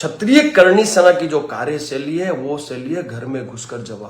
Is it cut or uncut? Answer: uncut